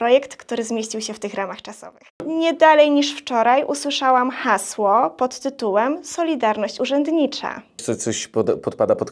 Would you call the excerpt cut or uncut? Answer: cut